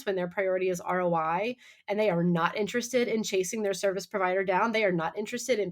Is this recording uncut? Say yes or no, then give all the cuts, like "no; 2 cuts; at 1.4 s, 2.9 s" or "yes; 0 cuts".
yes; 0 cuts